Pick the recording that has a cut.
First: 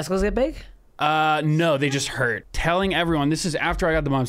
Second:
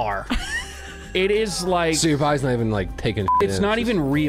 first; 1 cut; at 2.5 s

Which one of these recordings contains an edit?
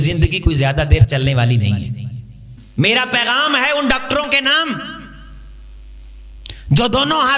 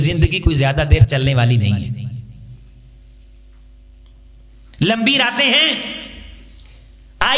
first; 1 cut; at 2.5 s

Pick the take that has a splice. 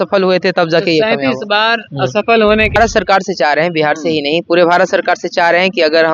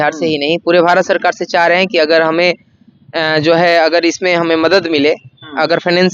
first; 1 cut; at 2.8 s

